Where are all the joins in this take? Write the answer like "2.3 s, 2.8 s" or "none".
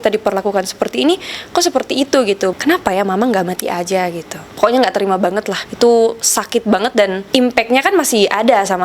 2.5 s, 4.4 s, 5.6 s, 7.2 s